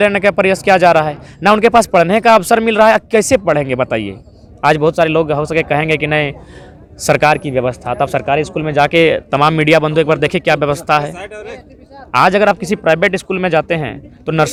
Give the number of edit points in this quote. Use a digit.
0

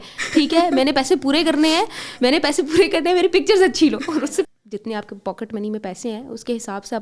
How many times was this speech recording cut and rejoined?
1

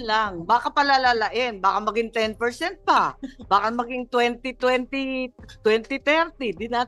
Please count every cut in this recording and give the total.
0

